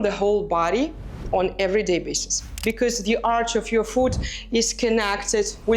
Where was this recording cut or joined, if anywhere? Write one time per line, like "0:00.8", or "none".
0:02.5